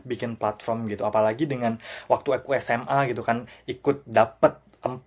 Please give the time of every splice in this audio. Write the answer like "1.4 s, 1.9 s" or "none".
none